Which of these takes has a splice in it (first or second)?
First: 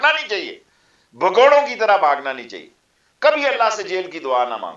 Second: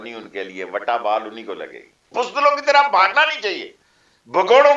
second